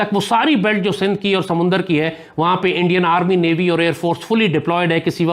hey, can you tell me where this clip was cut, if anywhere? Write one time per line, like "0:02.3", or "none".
none